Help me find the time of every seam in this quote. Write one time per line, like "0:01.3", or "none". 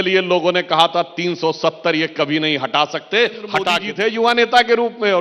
0:03.8